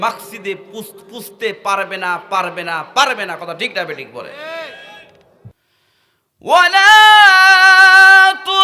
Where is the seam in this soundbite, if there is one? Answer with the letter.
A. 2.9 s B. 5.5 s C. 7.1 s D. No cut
B